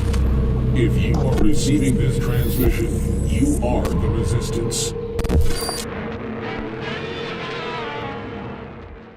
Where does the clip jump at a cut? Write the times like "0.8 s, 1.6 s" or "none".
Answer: none